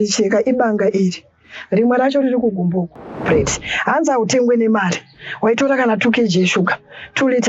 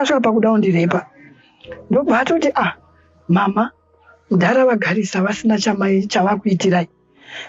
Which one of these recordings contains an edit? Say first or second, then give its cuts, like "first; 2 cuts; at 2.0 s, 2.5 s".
first; 1 cut; at 3.2 s